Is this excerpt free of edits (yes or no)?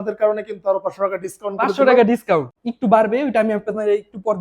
no